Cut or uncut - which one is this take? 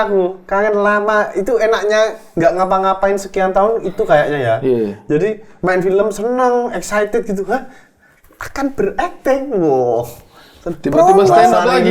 uncut